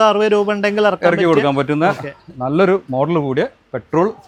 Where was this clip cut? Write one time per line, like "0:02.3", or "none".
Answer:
none